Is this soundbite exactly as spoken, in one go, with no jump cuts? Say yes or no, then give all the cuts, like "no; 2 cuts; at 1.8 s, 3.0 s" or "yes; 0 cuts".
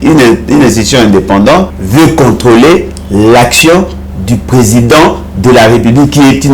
no; 1 cut; at 1.8 s